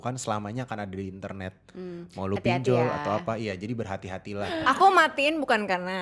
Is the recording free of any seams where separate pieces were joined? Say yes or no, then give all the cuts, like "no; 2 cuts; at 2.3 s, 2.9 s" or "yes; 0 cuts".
no; 1 cut; at 4.5 s